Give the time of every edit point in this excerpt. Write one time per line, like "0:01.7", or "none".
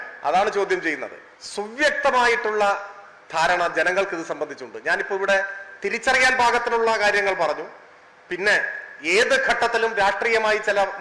0:01.3